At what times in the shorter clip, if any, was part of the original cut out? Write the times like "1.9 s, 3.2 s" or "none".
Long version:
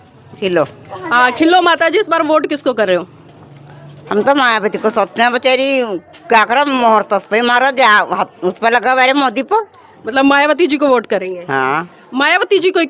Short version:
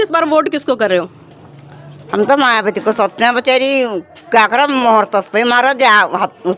none